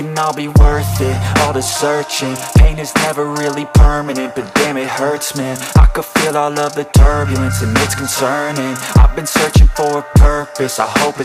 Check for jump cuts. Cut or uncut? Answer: uncut